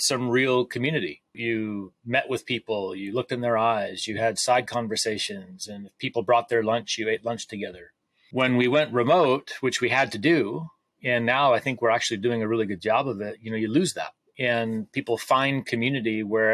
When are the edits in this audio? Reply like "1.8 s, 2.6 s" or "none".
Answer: none